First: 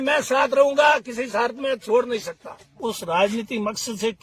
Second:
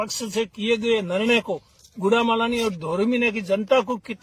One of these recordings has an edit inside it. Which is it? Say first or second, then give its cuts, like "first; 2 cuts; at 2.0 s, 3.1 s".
first; 1 cut; at 2.8 s